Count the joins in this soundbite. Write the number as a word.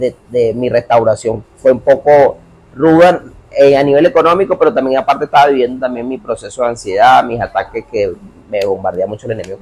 zero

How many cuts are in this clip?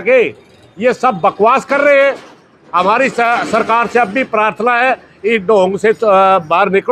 zero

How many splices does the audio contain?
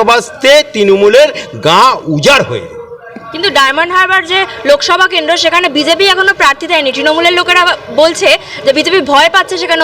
zero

